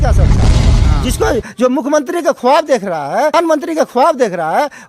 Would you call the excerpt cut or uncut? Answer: cut